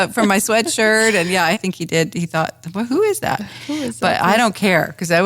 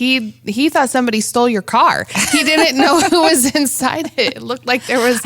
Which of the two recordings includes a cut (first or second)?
first